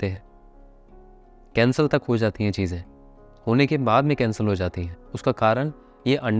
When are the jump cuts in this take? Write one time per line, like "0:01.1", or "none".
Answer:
none

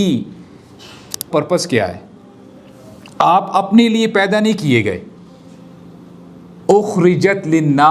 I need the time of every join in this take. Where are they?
0:01.3

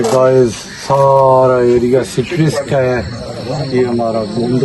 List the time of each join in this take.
none

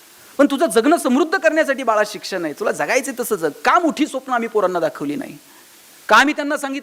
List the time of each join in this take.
none

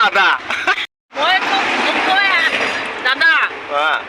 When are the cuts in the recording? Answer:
0:01.1

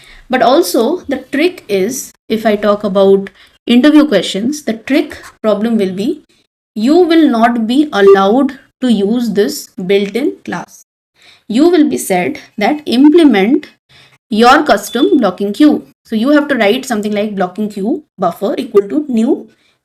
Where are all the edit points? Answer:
none

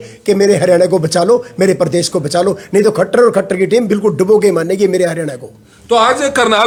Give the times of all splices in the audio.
none

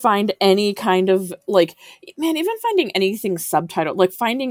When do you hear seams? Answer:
none

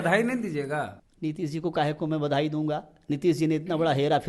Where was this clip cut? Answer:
0:01.0

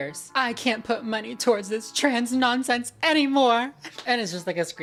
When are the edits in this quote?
none

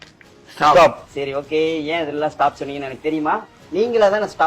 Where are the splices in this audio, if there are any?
0:01.1
0:03.5

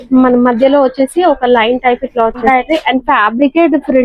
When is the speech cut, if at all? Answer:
0:02.4

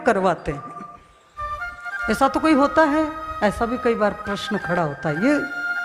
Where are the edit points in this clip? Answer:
none

